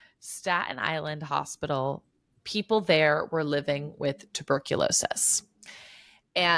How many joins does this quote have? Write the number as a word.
zero